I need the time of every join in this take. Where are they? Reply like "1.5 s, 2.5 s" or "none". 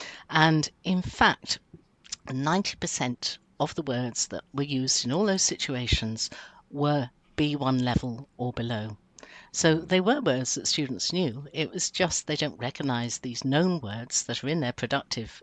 none